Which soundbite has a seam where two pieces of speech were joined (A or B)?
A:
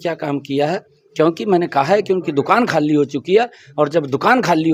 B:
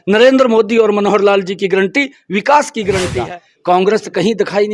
B